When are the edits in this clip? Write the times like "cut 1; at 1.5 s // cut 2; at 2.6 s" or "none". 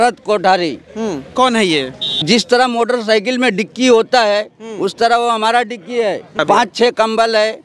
cut 1; at 2.2 s // cut 2; at 6.4 s